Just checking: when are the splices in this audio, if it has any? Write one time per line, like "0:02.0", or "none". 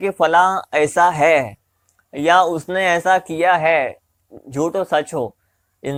none